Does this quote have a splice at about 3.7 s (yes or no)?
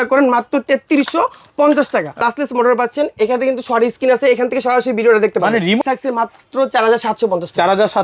no